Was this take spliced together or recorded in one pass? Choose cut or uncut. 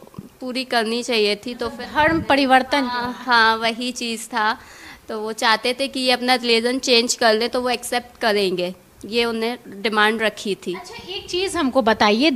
uncut